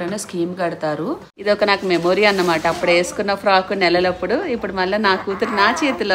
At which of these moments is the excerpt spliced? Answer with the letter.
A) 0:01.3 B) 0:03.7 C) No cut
A